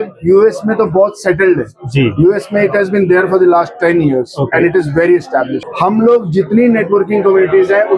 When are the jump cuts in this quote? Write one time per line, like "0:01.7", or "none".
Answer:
0:05.6